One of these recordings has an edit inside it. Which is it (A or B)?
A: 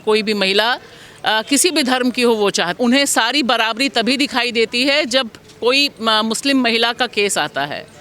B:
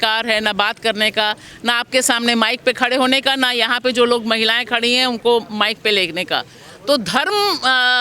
A